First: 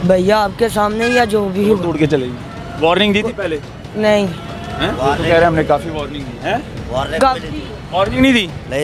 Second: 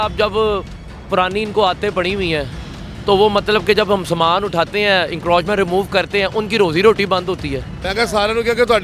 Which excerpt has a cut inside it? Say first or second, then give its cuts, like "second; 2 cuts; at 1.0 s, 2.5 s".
second; 1 cut; at 7.8 s